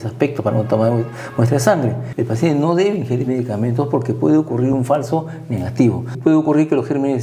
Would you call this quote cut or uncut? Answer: cut